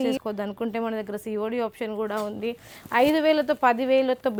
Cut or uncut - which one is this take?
uncut